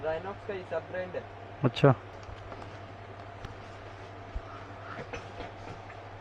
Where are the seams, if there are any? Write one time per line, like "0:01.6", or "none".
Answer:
0:02.1
0:03.5